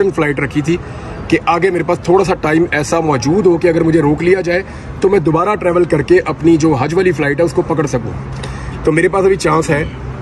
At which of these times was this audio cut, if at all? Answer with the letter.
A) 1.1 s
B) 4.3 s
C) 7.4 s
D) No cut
D